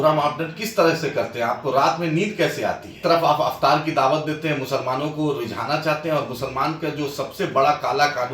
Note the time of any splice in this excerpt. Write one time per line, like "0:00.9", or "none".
0:03.0